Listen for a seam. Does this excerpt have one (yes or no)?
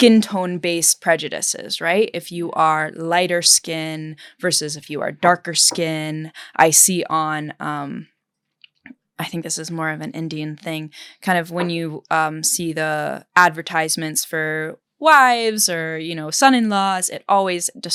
no